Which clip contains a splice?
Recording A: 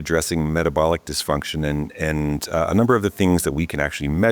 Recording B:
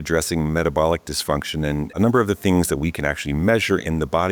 B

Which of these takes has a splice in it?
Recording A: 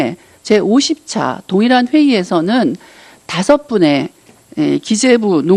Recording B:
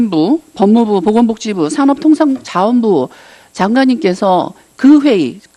B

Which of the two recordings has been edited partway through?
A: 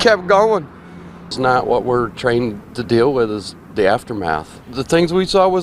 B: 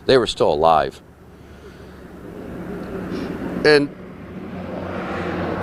A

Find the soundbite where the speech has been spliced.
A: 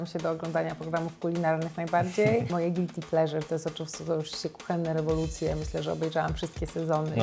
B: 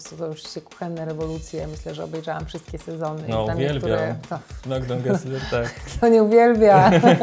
A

